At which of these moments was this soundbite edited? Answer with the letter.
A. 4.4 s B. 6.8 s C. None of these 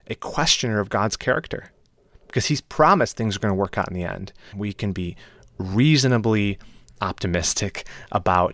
A